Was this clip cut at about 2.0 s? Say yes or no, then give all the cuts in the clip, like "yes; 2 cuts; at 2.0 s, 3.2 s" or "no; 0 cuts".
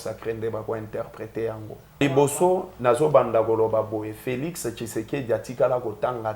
yes; 1 cut; at 2.0 s